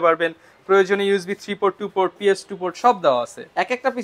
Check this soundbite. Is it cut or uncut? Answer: uncut